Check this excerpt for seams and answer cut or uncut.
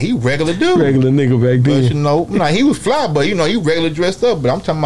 cut